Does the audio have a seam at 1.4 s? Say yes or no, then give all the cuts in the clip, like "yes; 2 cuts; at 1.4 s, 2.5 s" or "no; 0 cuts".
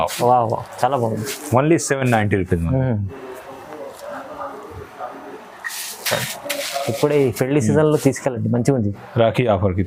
no; 0 cuts